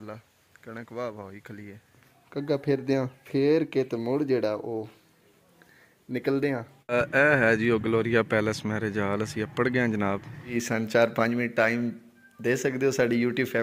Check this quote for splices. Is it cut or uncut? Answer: cut